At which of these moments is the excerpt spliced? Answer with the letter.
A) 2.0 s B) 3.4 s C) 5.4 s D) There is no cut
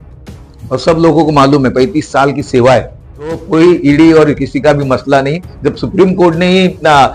B